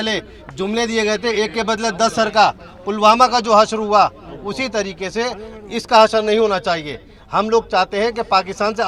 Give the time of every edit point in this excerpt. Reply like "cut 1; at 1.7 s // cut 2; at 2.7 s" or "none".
none